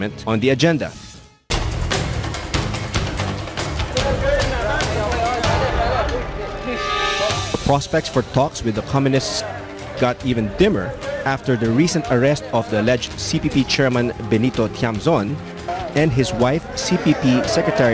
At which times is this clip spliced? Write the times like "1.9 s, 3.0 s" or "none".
5.8 s